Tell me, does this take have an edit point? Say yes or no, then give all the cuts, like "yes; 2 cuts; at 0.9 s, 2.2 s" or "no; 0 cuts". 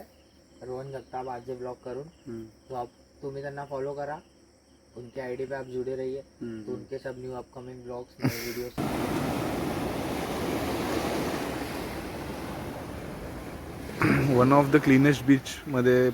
yes; 1 cut; at 8.8 s